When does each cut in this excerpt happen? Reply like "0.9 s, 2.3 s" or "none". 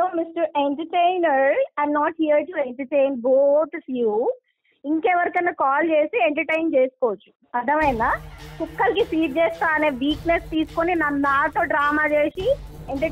none